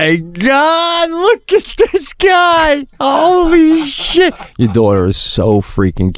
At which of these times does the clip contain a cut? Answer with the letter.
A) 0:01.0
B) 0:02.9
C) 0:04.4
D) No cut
D